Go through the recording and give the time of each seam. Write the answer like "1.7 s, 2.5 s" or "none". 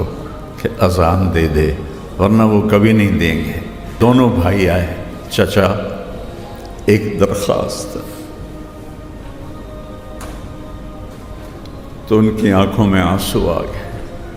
4.0 s

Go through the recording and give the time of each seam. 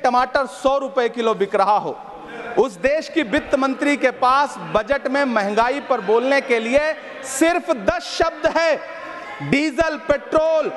none

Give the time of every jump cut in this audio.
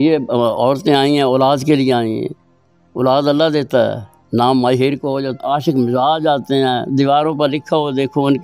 5.4 s

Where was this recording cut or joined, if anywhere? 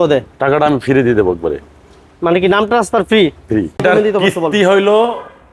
3.8 s

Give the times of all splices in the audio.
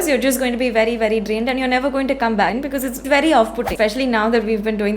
2.6 s, 3.7 s

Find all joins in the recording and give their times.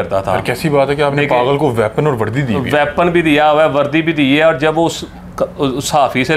none

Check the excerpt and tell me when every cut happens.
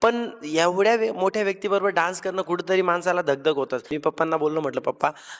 3.9 s

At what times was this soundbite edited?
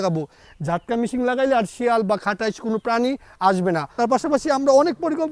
3.9 s

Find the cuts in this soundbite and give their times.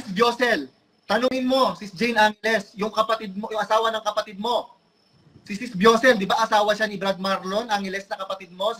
none

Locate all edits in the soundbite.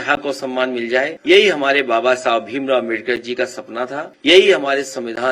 1.2 s, 4.1 s

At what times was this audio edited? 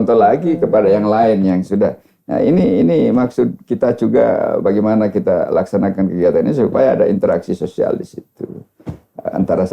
none

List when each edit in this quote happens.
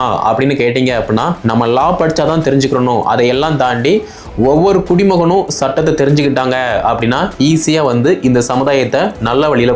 none

